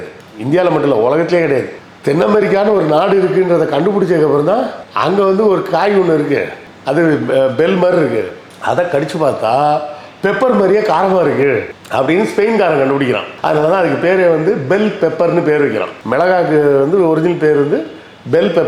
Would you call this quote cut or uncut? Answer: uncut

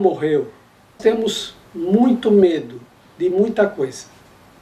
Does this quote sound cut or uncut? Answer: cut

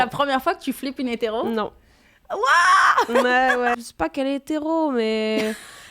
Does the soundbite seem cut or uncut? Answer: cut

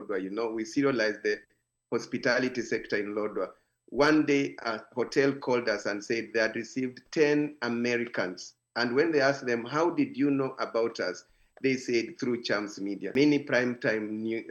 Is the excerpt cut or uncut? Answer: cut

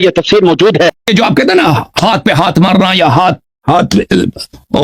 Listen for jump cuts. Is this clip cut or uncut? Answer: cut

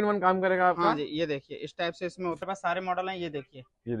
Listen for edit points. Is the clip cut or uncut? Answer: cut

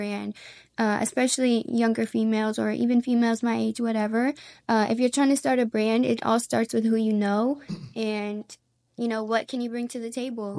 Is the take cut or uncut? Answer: uncut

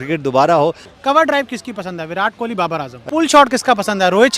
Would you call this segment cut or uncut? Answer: cut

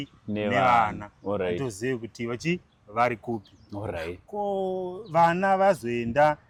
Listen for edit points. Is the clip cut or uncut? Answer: uncut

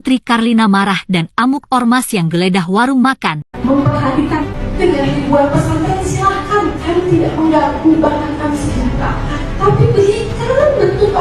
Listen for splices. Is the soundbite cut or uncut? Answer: cut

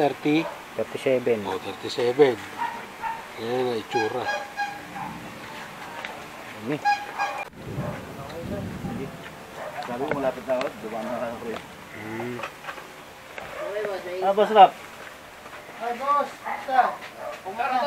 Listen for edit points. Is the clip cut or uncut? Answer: uncut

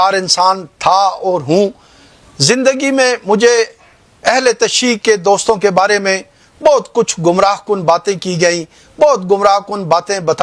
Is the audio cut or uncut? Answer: uncut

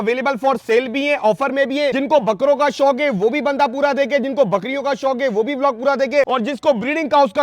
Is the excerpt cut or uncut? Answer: cut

